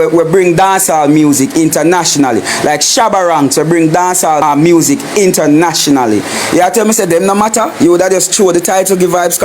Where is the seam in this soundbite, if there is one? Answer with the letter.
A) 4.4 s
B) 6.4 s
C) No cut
A